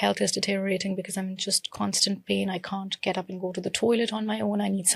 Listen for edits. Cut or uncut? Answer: uncut